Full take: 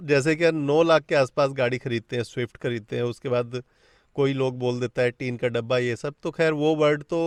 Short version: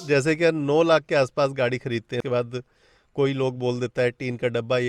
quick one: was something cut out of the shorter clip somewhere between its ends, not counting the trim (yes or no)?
yes